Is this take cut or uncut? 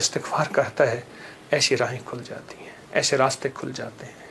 uncut